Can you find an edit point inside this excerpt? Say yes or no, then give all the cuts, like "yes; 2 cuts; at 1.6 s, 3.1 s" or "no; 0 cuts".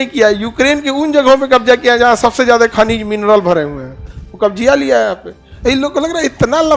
no; 0 cuts